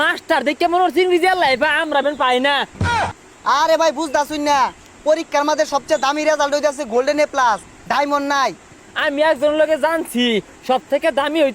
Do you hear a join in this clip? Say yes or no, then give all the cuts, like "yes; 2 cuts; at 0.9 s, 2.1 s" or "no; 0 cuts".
yes; 2 cuts; at 2.9 s, 8.8 s